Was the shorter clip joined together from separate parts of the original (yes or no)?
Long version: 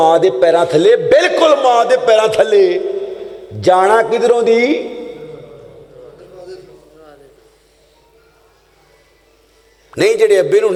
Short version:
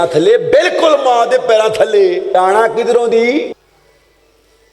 yes